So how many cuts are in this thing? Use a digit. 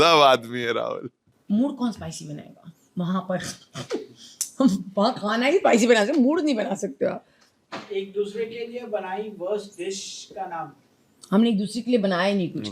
0